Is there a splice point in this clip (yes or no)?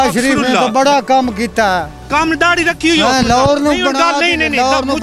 no